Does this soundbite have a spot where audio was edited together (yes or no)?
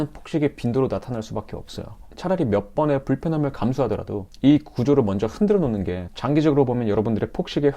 no